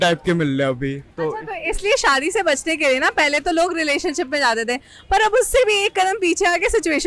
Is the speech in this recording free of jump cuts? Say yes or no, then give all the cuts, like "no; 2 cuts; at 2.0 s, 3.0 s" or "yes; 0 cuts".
yes; 0 cuts